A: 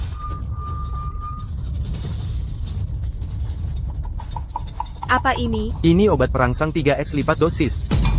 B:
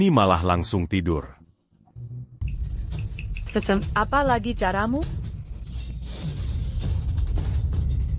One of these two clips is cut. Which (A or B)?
B